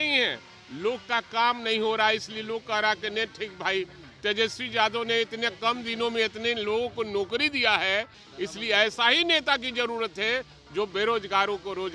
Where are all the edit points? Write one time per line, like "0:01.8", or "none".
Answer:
0:08.2